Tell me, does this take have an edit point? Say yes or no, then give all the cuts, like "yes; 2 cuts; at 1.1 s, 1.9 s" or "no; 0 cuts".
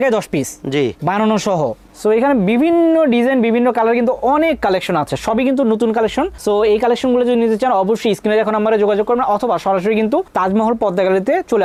no; 0 cuts